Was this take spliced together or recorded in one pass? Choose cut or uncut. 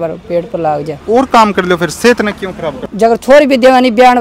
cut